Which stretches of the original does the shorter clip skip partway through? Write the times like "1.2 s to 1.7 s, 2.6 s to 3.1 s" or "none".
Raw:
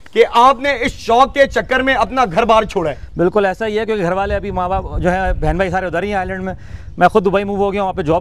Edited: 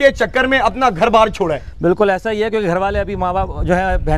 none

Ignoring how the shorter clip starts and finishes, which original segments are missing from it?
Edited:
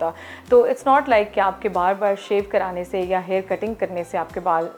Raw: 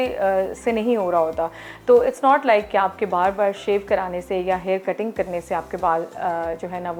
none

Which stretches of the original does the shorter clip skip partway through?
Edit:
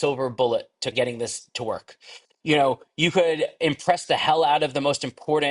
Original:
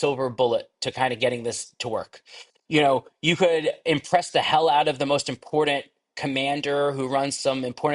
0.9 s to 1.2 s

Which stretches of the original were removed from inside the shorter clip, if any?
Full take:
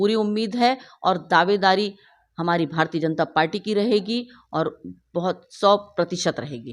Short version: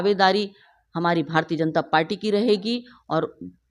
none

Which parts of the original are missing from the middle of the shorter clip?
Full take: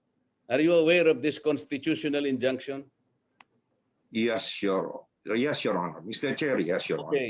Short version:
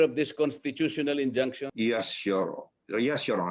2.7 s to 4.0 s

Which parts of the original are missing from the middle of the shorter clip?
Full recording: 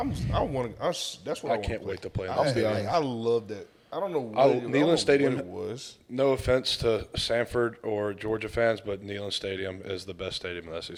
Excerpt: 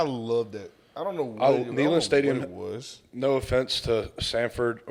none

